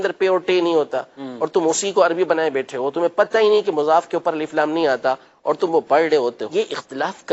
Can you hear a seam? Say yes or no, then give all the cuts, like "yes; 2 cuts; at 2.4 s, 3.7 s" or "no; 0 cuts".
yes; 1 cut; at 6.4 s